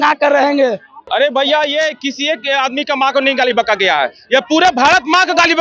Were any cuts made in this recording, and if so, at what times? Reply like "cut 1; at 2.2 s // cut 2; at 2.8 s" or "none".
cut 1; at 1.0 s

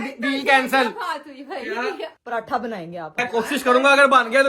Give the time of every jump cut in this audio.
cut 1; at 2.2 s // cut 2; at 3.2 s

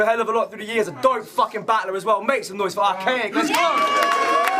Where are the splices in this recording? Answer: none

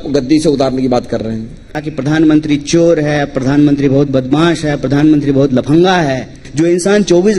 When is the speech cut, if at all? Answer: cut 1; at 1.8 s // cut 2; at 6.4 s

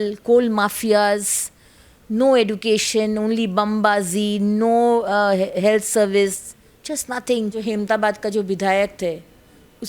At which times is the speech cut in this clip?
cut 1; at 7.6 s

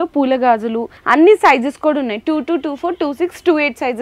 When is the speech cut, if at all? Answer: cut 1; at 0.9 s

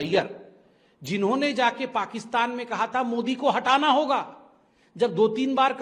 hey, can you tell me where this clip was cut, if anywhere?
none

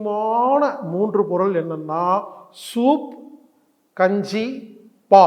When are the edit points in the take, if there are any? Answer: none

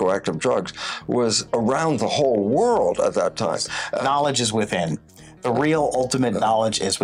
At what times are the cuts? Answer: cut 1; at 4.0 s

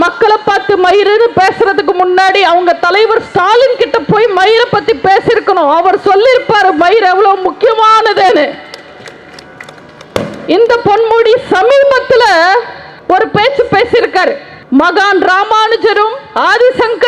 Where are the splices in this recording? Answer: none

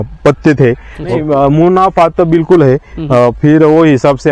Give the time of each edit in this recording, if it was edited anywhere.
cut 1; at 1.2 s

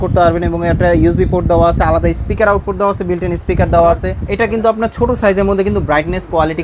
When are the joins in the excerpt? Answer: cut 1; at 4.2 s

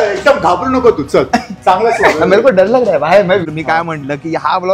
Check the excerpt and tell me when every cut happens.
cut 1; at 3.3 s

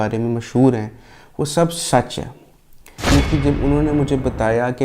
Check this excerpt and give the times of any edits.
cut 1; at 3.1 s

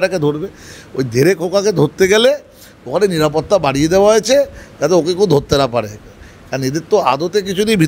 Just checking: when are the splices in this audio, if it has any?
none

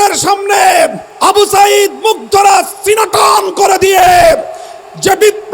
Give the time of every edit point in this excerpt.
cut 1; at 1.1 s

